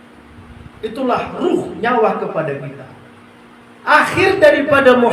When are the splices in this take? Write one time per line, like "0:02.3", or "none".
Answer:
none